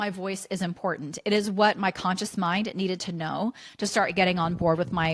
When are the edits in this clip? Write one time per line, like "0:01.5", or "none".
none